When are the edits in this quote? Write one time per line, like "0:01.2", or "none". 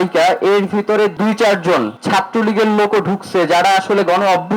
0:01.1
0:02.0